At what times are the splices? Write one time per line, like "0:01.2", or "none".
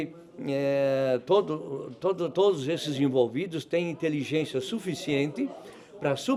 none